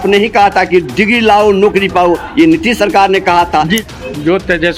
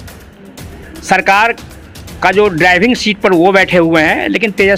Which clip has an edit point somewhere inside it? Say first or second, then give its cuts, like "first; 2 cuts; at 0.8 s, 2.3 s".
first; 1 cut; at 3.8 s